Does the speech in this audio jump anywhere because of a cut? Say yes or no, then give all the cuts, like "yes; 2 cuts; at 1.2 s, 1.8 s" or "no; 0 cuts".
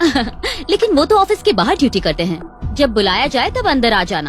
no; 0 cuts